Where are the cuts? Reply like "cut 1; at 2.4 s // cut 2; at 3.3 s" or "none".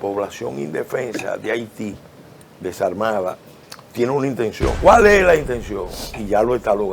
cut 1; at 4.8 s